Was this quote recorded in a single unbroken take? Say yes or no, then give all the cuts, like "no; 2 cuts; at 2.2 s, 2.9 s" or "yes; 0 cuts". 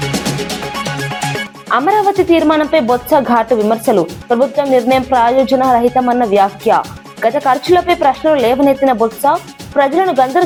yes; 0 cuts